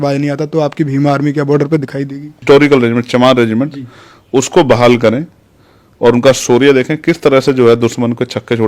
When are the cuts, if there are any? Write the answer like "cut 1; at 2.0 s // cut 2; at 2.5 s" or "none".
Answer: cut 1; at 2.3 s